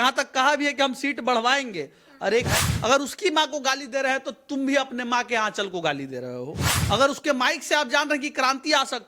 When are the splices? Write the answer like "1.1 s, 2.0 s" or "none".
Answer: 2.5 s, 6.7 s